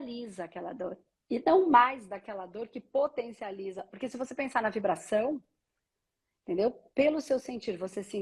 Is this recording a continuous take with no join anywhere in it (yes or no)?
no